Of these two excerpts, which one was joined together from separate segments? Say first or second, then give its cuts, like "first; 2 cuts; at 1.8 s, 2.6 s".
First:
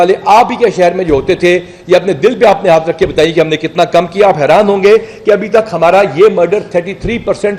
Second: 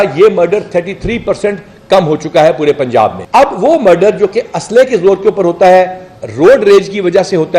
second; 1 cut; at 3.2 s